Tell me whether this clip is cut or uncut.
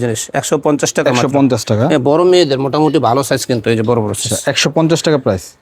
uncut